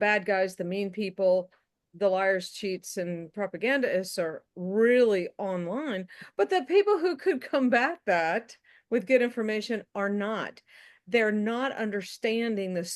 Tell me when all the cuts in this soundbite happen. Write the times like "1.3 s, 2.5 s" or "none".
none